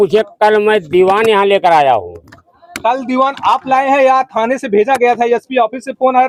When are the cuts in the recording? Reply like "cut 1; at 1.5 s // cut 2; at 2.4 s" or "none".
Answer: none